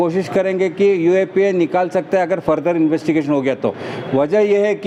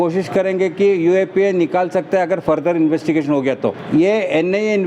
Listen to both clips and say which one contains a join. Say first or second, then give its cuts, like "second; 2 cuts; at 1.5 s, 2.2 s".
second; 1 cut; at 3.7 s